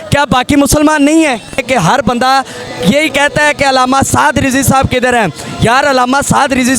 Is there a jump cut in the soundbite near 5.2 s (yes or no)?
no